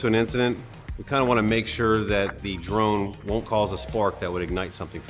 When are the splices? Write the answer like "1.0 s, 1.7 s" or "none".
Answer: none